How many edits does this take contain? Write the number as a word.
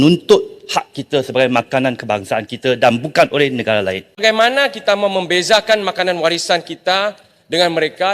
one